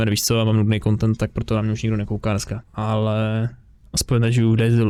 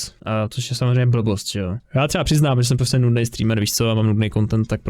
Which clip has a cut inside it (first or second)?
second